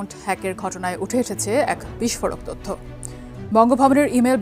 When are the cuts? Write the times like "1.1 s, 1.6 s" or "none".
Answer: none